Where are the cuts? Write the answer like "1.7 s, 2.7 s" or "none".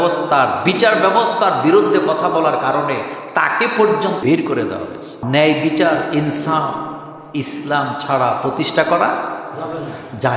4.2 s, 5.2 s